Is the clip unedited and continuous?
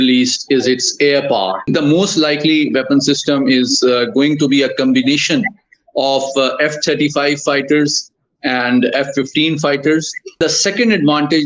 no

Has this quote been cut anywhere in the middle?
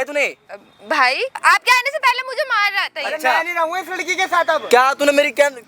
yes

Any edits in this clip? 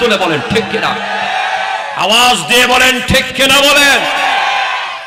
no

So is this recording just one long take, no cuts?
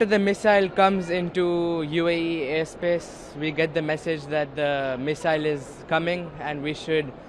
yes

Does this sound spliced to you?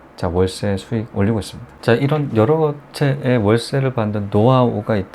yes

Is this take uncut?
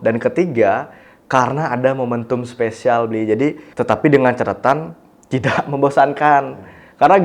no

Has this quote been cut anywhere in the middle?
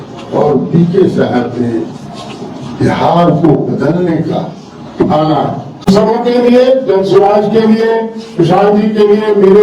yes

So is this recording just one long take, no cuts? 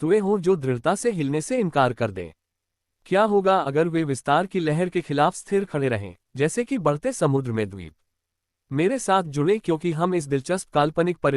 yes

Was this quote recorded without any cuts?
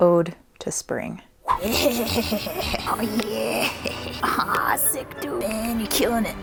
yes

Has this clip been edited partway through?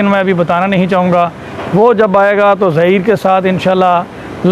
no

